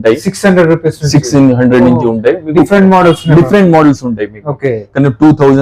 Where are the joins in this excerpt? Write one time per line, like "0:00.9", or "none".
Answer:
none